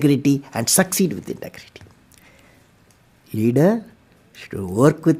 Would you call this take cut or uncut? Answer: uncut